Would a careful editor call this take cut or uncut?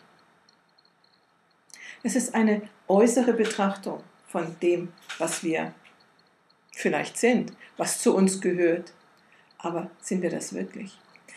cut